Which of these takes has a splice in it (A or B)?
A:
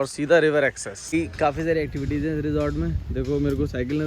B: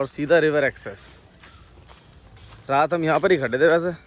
A